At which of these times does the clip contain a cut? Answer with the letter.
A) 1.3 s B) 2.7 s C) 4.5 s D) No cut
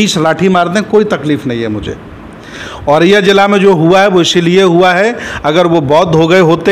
B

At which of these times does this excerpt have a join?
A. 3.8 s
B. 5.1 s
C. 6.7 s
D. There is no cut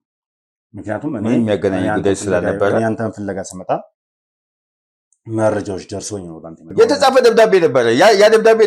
C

